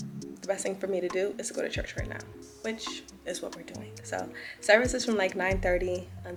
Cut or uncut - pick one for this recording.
uncut